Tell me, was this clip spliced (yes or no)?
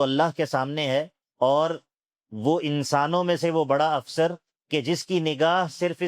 yes